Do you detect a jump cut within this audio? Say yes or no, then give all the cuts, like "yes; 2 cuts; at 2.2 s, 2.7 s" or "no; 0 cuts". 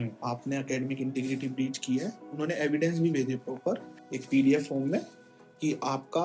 no; 0 cuts